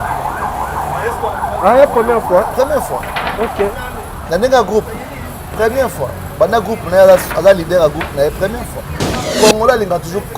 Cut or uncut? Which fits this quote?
cut